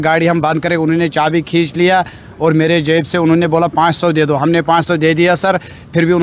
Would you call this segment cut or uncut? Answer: uncut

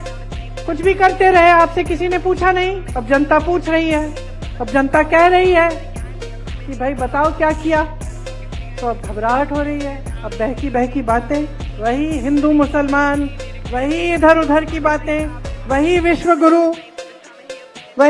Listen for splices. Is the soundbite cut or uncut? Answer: uncut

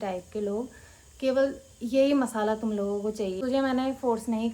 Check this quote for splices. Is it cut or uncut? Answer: cut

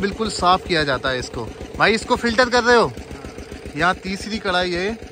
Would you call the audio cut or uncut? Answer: uncut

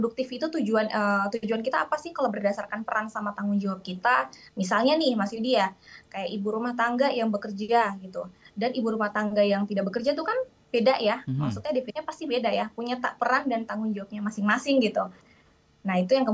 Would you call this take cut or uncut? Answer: cut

